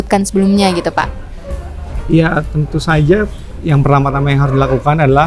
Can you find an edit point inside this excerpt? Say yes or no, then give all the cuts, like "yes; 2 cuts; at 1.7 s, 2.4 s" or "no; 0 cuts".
no; 0 cuts